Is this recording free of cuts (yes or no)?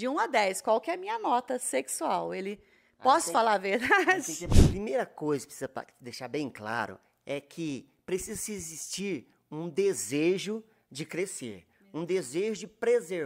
no